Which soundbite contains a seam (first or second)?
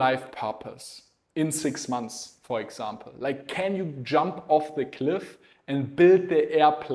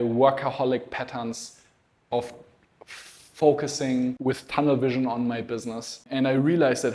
second